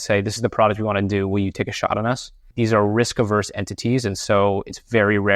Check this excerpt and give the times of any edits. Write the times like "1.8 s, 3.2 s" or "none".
2.4 s